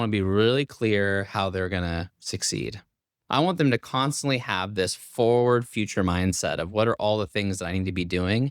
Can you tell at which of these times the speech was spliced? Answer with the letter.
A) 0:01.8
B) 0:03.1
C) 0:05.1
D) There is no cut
B